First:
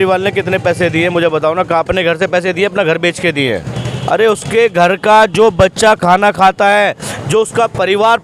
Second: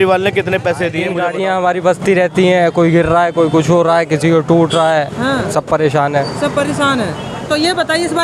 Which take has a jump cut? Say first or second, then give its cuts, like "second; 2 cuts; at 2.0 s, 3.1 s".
second; 1 cut; at 1.1 s